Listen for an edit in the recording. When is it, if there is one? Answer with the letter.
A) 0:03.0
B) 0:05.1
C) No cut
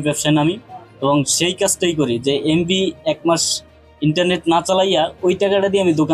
C